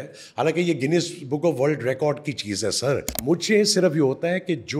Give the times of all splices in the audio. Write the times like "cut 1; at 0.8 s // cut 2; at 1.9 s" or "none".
cut 1; at 3.1 s